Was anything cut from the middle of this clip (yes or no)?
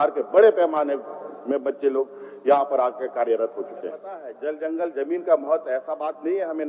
yes